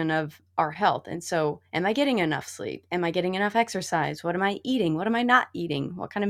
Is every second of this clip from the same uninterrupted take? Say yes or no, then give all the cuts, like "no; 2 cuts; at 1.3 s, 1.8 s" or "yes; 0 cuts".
yes; 0 cuts